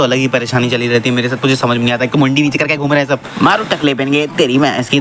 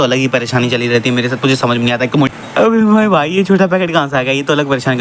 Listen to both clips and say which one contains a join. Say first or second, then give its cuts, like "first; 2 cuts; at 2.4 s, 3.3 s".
second; 1 cut; at 2.3 s